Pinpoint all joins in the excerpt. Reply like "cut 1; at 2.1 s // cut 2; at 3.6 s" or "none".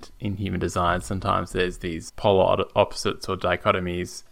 cut 1; at 2.0 s